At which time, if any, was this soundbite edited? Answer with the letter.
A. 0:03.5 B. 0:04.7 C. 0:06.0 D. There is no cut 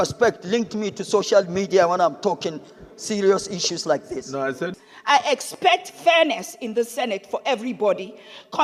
B